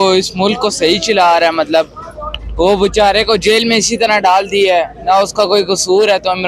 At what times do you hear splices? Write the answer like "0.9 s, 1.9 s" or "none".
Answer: none